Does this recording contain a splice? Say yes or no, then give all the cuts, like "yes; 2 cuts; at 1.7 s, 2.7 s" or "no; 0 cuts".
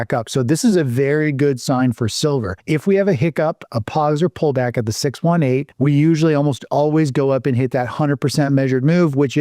yes; 2 cuts; at 2.5 s, 5.7 s